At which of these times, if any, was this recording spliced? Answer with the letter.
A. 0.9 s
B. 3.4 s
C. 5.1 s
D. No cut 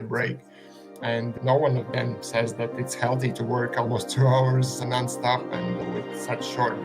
D